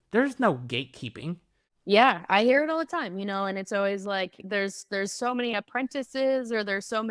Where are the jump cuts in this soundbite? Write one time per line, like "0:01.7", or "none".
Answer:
0:01.7